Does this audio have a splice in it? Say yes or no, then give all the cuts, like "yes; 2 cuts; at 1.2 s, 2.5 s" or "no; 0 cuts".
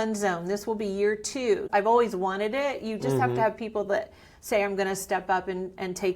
yes; 1 cut; at 1.6 s